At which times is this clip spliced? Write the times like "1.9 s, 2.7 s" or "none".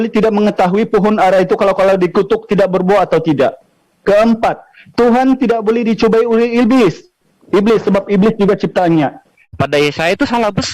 9.5 s